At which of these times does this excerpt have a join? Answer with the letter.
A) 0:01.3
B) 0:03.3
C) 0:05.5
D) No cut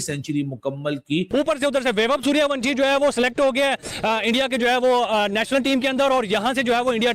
A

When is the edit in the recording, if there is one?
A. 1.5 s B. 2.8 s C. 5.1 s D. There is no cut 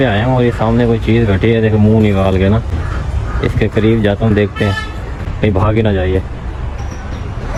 D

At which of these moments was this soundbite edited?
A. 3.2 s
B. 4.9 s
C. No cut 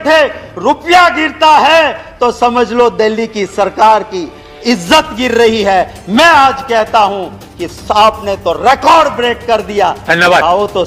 C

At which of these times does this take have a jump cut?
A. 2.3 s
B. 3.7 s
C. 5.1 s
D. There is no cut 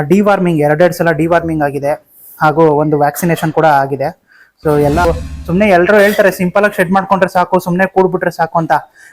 C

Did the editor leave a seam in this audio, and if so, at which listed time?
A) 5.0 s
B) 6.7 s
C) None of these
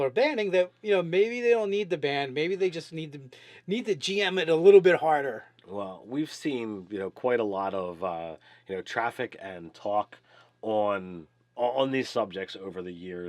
A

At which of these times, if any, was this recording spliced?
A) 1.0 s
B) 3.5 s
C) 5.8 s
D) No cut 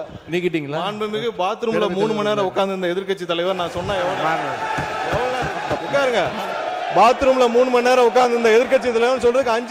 C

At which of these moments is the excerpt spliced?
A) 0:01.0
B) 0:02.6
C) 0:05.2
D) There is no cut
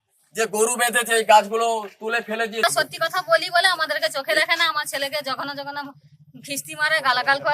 B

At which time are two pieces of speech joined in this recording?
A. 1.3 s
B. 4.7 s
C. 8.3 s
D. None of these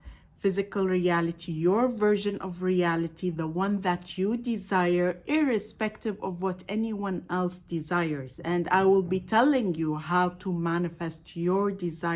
C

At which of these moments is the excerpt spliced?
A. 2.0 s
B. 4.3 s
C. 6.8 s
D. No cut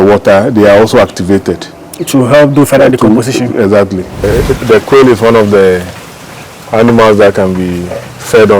B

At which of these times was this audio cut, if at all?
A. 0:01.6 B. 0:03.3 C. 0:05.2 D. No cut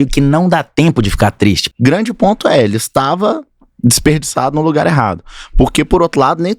A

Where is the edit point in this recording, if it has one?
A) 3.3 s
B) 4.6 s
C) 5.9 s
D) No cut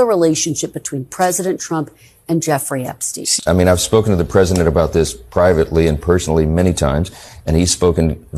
A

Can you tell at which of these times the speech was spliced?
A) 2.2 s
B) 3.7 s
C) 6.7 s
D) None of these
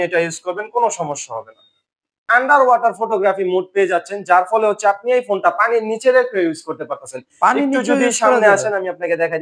A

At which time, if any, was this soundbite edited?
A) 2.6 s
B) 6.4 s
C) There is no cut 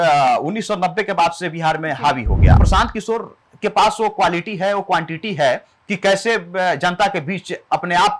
A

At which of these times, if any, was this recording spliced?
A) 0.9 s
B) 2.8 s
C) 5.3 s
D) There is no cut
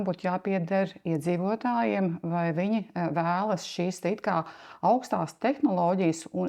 D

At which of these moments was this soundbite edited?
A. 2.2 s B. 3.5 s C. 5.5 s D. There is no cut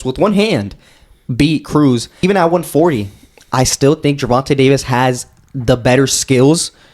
A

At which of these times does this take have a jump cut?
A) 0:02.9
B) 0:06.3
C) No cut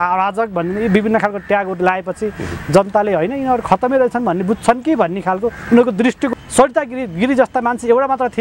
B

